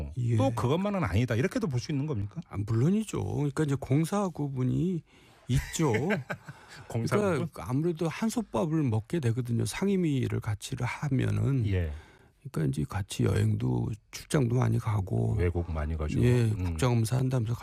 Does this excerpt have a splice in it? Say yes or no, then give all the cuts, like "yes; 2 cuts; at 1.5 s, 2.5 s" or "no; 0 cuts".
no; 0 cuts